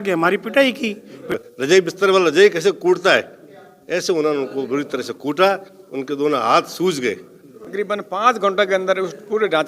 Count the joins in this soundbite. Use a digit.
2